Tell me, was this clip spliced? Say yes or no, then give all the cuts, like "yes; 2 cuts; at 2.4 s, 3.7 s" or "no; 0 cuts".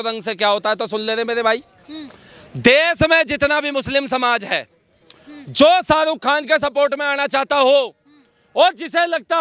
no; 0 cuts